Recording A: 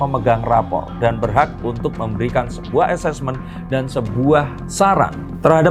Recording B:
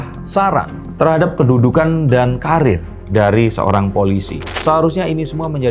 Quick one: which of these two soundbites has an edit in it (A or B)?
B